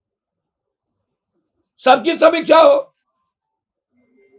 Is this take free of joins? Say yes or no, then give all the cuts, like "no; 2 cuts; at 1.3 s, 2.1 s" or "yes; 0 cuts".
yes; 0 cuts